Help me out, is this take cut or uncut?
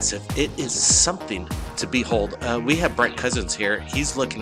uncut